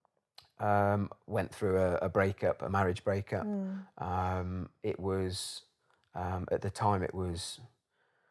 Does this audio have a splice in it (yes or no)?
no